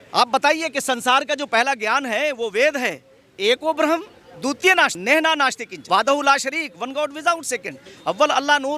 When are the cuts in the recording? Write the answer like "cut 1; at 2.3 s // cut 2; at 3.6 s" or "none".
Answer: cut 1; at 5.0 s // cut 2; at 5.7 s